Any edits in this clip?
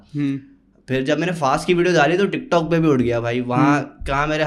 no; 0 cuts

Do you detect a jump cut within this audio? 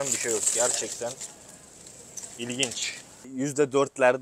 yes; 1 cut; at 3.2 s

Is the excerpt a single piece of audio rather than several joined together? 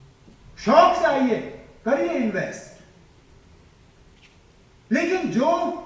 yes; 0 cuts

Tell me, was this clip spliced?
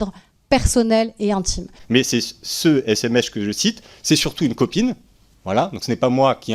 yes; 1 cut; at 1.8 s

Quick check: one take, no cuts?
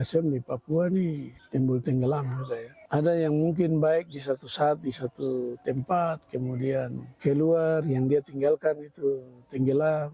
no; 3 cuts; at 1.3 s, 2.7 s, 7.0 s

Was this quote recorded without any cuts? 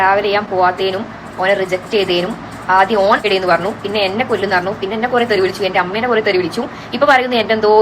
yes; 0 cuts

